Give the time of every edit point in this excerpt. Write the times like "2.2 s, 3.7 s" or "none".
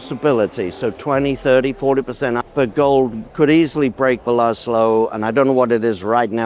2.4 s, 3.2 s